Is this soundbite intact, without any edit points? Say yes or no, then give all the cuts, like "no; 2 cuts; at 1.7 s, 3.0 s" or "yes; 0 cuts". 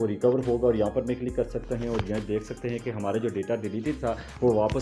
yes; 0 cuts